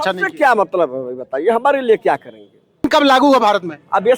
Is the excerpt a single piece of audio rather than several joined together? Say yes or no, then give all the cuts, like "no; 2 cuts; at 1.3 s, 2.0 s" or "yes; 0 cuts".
no; 1 cut; at 2.9 s